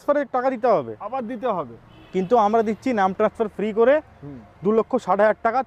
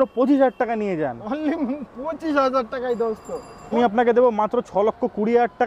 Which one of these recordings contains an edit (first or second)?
second